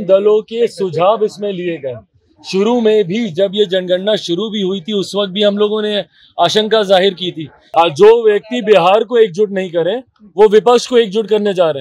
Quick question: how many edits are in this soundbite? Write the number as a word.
one